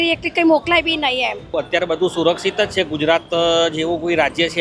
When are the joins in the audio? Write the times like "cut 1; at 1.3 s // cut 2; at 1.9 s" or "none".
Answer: cut 1; at 1.5 s